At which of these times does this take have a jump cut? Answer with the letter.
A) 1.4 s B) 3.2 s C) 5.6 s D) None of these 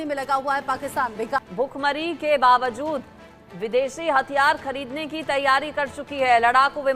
A